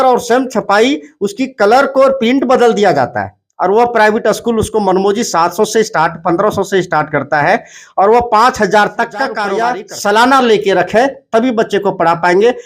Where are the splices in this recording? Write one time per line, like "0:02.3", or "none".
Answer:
0:09.4